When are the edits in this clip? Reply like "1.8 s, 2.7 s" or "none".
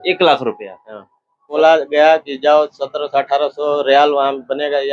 1.5 s